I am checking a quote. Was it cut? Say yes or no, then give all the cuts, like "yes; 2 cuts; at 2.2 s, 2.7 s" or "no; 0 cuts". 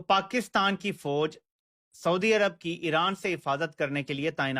no; 0 cuts